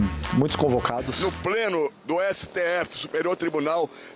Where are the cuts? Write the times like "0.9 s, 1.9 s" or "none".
1.1 s